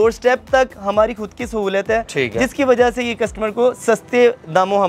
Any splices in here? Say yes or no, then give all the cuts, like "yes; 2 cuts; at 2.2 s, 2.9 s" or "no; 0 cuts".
no; 0 cuts